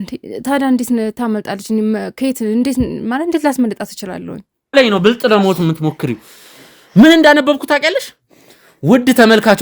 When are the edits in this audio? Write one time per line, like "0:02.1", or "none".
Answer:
0:04.8